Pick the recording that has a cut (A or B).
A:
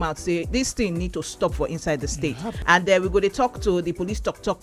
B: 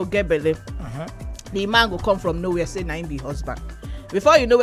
A